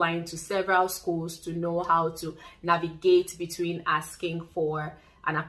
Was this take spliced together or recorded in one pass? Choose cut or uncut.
uncut